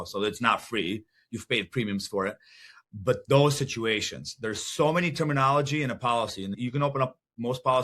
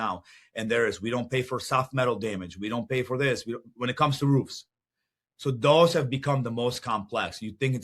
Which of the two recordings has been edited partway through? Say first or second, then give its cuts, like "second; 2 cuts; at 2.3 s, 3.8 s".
first; 1 cut; at 6.5 s